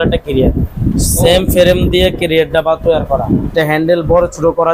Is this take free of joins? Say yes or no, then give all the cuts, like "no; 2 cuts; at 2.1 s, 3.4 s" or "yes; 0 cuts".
no; 1 cut; at 3.5 s